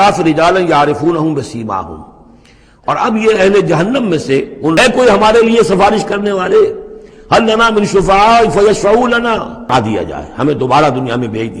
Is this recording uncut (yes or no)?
no